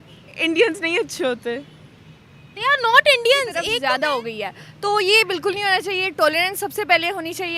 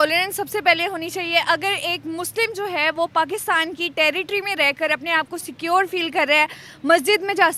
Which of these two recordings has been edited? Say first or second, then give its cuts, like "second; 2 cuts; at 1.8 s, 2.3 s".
first; 1 cut; at 3.7 s